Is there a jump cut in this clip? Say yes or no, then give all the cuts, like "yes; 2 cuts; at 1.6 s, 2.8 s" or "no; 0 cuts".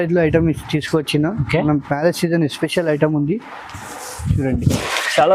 no; 0 cuts